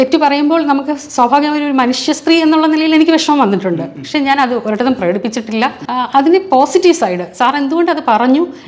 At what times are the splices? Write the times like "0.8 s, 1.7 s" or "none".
5.8 s